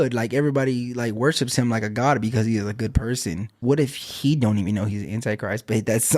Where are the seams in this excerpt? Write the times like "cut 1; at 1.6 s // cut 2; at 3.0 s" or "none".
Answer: cut 1; at 3.6 s

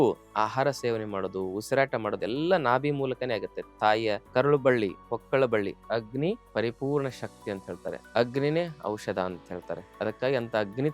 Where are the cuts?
cut 1; at 4.2 s // cut 2; at 5.9 s // cut 3; at 8.0 s // cut 4; at 9.8 s

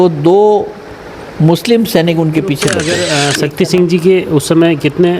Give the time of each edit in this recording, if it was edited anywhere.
cut 1; at 2.8 s

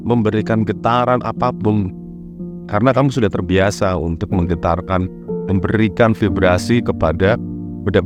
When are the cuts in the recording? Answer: none

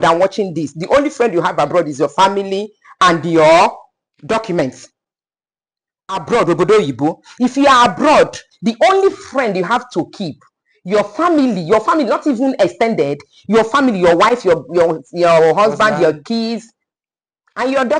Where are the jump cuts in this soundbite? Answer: none

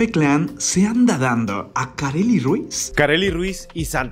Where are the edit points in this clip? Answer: cut 1; at 2.8 s

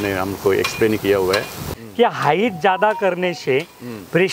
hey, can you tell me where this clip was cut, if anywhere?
cut 1; at 1.7 s

